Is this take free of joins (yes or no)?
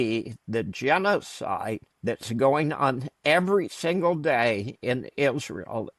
no